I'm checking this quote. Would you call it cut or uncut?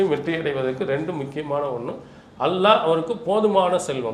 uncut